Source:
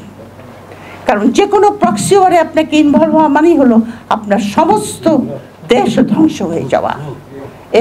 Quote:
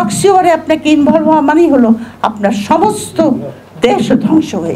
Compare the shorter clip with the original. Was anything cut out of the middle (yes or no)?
no